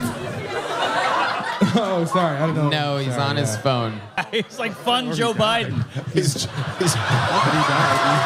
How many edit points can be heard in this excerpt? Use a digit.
1